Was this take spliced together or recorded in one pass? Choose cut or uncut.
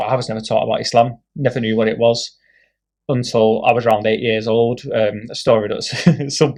uncut